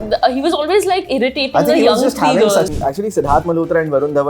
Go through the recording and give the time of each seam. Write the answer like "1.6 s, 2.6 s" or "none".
2.7 s